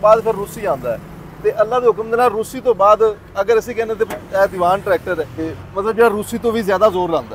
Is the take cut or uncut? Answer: cut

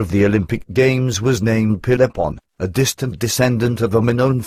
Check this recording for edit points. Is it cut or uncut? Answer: uncut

